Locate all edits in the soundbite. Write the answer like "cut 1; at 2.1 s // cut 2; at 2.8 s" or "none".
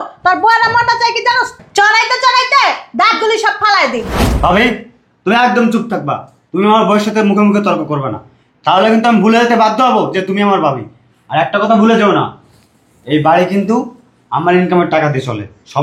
cut 1; at 4.1 s